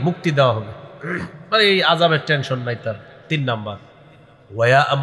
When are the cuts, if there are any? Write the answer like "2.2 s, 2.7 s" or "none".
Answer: none